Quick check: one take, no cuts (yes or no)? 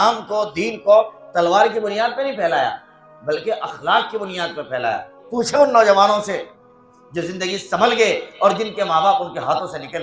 no